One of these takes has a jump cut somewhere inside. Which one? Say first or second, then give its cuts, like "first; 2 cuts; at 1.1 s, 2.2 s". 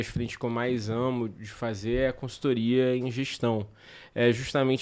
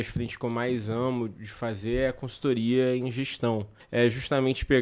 second; 1 cut; at 3.8 s